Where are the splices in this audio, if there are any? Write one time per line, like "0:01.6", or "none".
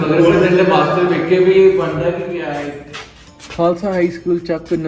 0:02.8